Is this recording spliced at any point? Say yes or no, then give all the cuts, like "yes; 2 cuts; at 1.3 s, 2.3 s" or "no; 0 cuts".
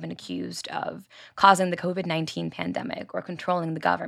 no; 0 cuts